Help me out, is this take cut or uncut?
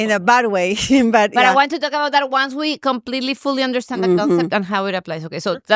uncut